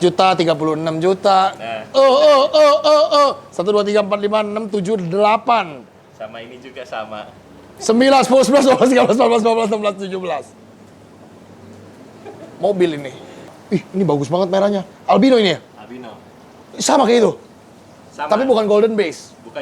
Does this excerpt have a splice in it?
yes; 1 cut; at 13.6 s

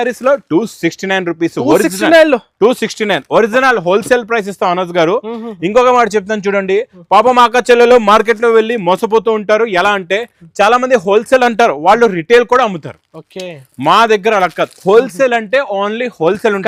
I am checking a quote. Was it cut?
no; 0 cuts

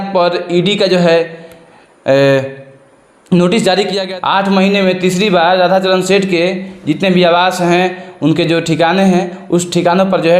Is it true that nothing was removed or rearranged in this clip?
no; 1 cut; at 4.0 s

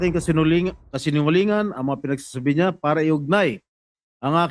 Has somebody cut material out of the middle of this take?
no; 0 cuts

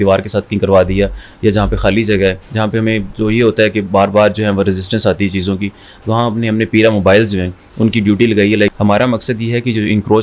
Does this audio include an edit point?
yes; 2 cuts; at 2.5 s, 8.7 s

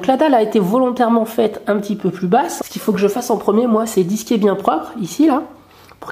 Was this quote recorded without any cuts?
no; 1 cut; at 2.5 s

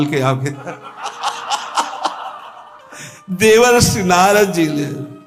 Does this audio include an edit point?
no; 0 cuts

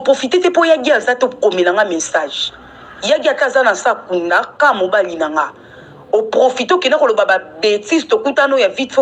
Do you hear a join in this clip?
yes; 1 cut; at 1.0 s

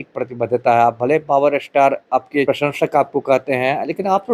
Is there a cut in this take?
yes; 1 cut; at 2.5 s

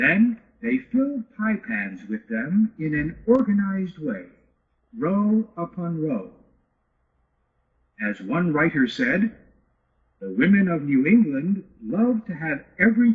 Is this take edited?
yes; 2 cuts; at 1.2 s, 8.8 s

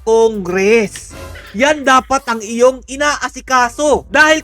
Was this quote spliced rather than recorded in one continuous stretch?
no; 0 cuts

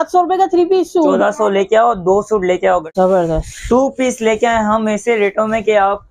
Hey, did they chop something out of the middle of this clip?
yes; 1 cut; at 2.9 s

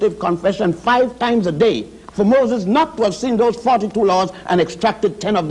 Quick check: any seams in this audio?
no; 0 cuts

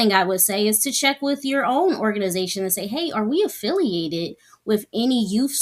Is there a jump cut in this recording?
no; 0 cuts

